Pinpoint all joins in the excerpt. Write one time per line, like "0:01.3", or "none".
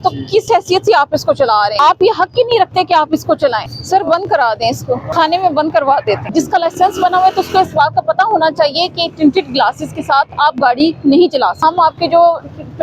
0:01.8
0:03.7
0:05.1
0:06.3
0:11.6